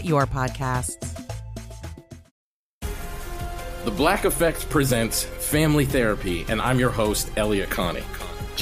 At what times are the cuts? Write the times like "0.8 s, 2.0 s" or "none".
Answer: 2.2 s